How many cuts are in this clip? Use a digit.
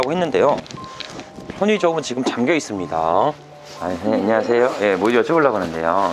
1